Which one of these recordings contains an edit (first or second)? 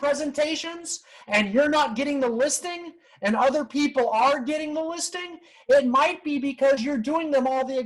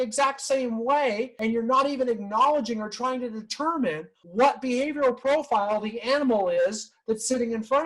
second